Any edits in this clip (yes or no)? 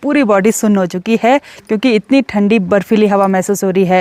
no